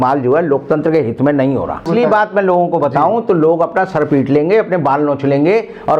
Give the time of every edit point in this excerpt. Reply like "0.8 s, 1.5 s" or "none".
1.9 s